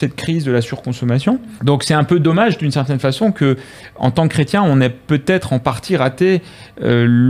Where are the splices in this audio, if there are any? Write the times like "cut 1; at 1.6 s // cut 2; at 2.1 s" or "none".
cut 1; at 1.5 s